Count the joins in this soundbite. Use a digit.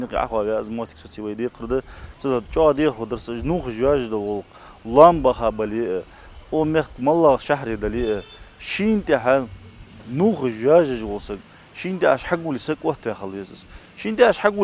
0